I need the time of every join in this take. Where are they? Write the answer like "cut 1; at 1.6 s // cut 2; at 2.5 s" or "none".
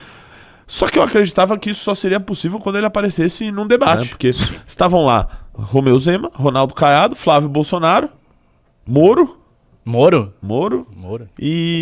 cut 1; at 4.1 s

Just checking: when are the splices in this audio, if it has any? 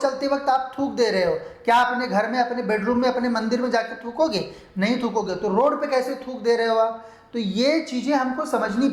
none

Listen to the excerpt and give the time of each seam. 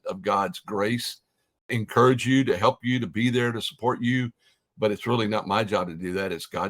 cut 1; at 1.7 s

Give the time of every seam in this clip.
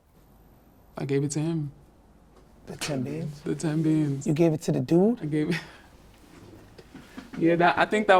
none

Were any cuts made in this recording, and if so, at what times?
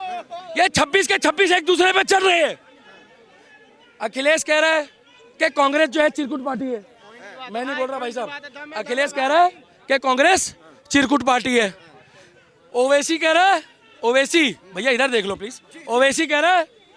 none

